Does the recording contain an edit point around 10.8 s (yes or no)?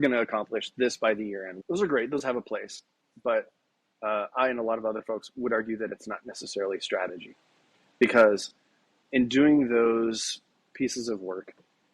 no